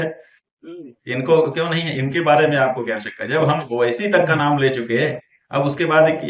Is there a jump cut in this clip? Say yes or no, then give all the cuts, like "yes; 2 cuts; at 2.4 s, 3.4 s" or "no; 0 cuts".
no; 0 cuts